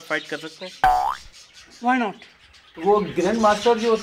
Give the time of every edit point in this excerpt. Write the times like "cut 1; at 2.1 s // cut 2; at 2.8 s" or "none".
none